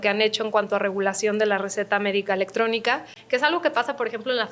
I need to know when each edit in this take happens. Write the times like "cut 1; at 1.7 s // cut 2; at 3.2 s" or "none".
cut 1; at 3.2 s

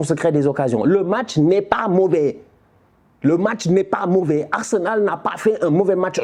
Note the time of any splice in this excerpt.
none

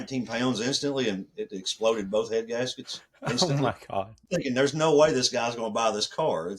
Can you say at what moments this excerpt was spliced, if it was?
cut 1; at 4.3 s

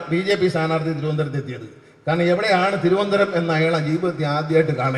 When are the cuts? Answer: none

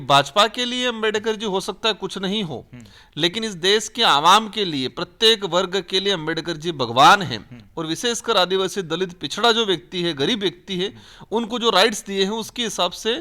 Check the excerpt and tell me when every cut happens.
none

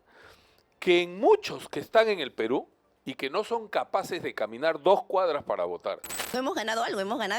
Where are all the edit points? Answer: cut 1; at 6.1 s

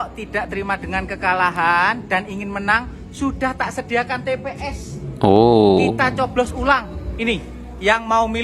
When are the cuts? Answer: none

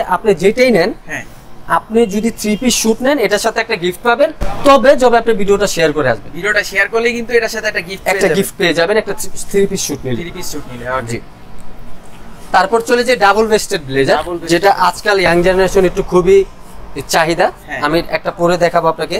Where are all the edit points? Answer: none

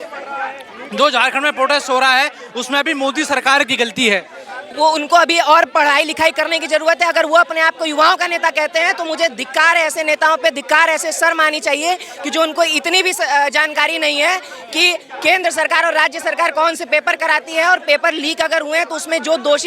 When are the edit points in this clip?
none

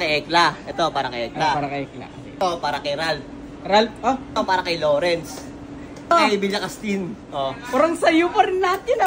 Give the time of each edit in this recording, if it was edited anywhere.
cut 1; at 2.3 s // cut 2; at 4.3 s // cut 3; at 6.1 s

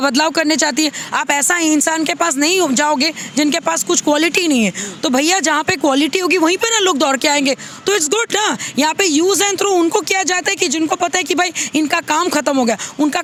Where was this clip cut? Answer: none

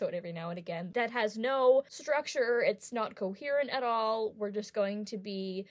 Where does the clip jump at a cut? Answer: cut 1; at 1.1 s // cut 2; at 1.9 s

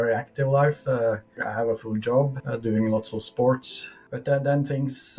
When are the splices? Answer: cut 1; at 1.3 s // cut 2; at 2.4 s

